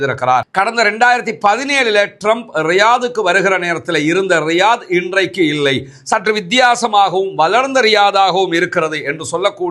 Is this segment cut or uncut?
uncut